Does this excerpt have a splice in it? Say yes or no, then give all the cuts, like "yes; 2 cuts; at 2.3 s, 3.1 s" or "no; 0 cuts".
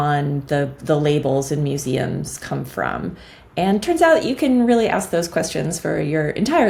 no; 0 cuts